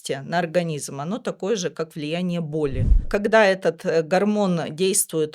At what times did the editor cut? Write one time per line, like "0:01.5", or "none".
0:03.0